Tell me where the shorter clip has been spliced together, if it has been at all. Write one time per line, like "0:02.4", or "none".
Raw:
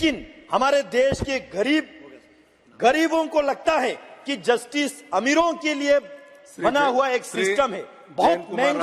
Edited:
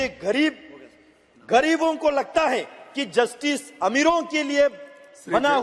none